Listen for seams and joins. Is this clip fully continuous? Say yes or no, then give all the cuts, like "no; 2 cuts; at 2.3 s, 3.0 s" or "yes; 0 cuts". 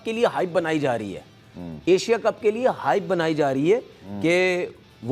yes; 0 cuts